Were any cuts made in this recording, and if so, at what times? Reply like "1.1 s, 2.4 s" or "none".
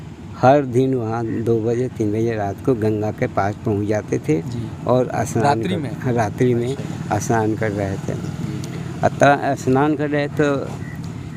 none